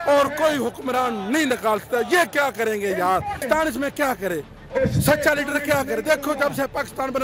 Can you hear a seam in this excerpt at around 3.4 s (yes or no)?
yes